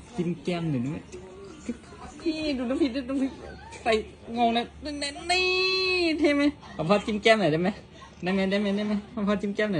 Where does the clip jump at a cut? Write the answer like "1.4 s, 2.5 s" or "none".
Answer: 2.4 s